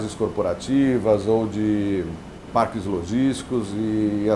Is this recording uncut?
no; 1 cut; at 2.5 s

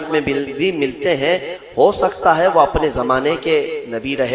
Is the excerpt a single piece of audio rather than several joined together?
yes; 0 cuts

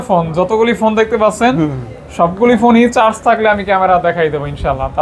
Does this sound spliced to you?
no; 0 cuts

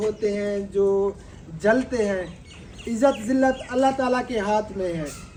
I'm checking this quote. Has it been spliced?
no; 0 cuts

